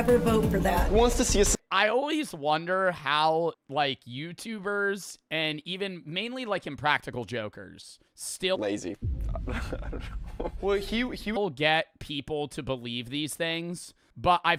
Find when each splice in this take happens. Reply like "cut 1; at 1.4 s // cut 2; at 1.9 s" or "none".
none